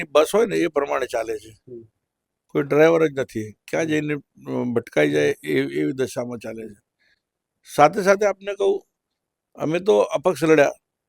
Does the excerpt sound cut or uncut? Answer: uncut